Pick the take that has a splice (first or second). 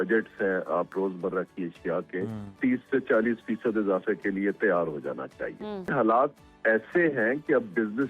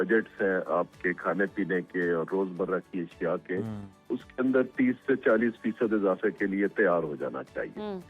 first